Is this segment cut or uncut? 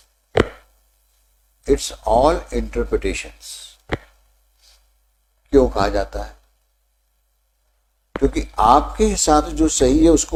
uncut